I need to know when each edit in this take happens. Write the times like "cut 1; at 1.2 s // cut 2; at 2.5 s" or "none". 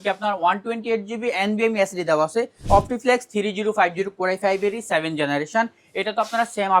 cut 1; at 2.6 s